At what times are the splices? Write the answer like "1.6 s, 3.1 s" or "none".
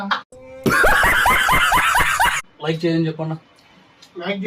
2.4 s